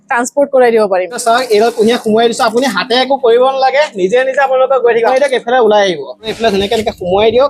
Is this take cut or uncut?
cut